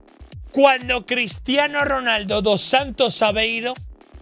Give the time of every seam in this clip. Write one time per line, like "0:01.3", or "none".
none

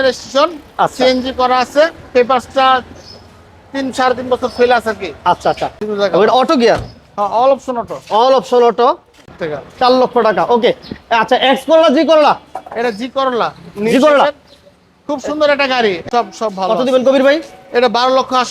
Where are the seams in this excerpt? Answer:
0:05.8
0:09.3
0:16.0

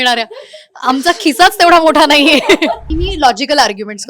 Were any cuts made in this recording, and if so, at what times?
0:02.9

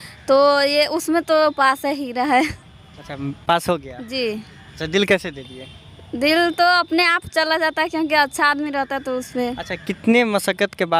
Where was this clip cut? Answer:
none

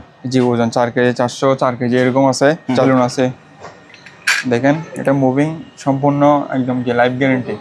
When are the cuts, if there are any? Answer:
0:02.8

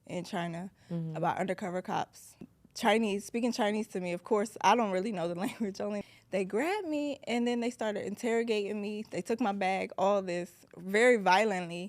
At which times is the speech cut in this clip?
0:02.4
0:06.0

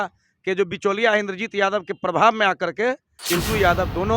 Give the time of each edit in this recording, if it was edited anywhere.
0:03.1

